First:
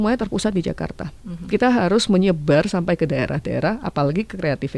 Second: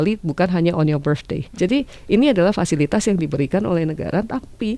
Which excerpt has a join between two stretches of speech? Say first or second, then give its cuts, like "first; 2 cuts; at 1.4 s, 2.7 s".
second; 1 cut; at 1.5 s